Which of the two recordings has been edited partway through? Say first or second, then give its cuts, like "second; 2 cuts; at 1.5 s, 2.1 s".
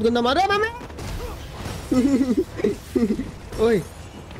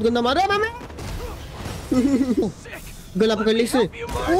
second; 1 cut; at 2.5 s